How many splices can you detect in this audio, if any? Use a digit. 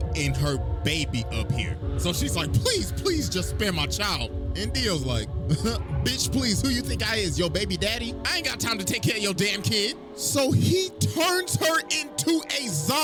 0